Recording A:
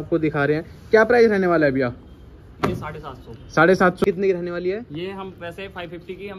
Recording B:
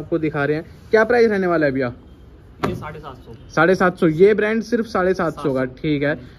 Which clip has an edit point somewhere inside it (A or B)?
A